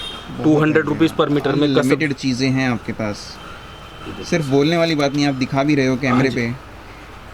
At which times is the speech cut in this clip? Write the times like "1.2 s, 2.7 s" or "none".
none